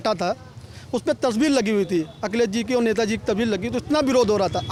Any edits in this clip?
no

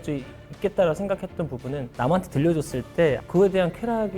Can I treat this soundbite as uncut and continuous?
no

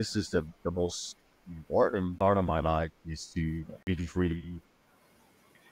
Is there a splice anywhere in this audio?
yes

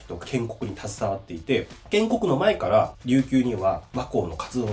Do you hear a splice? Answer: yes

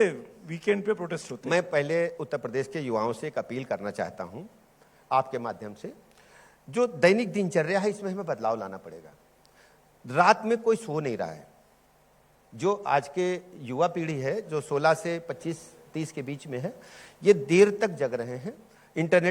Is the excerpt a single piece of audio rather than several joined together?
no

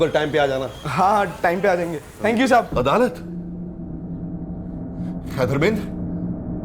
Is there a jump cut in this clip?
yes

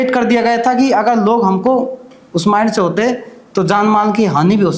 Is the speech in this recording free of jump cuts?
yes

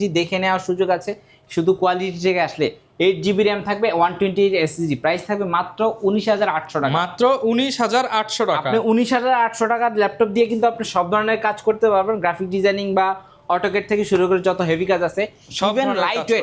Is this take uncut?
yes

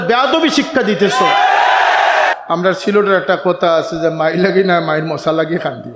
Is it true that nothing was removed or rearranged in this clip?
no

